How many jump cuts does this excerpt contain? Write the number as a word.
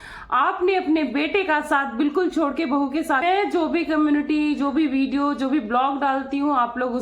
one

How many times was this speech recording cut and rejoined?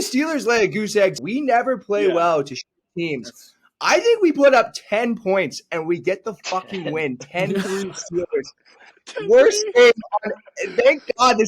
one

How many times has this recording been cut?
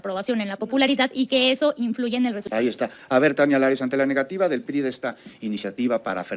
one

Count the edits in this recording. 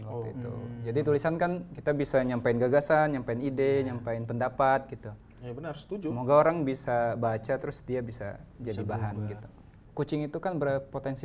one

